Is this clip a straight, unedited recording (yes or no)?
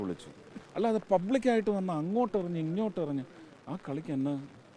yes